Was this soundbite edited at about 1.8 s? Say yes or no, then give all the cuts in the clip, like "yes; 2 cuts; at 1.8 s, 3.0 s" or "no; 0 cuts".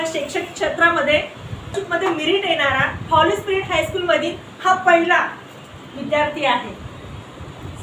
yes; 1 cut; at 1.8 s